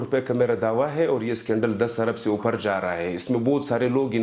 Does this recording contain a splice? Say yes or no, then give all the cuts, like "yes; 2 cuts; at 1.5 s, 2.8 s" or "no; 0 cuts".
no; 0 cuts